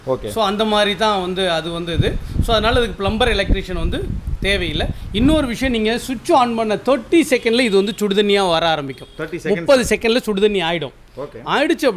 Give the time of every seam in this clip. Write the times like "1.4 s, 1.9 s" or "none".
none